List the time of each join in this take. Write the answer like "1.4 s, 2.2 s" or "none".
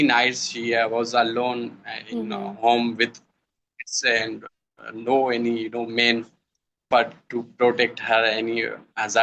none